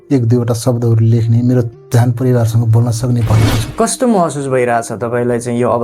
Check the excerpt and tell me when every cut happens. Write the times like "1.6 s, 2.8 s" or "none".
3.7 s